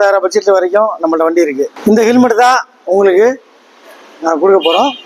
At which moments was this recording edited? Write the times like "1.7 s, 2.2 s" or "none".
1.7 s